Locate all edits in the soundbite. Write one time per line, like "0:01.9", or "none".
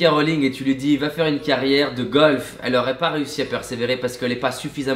none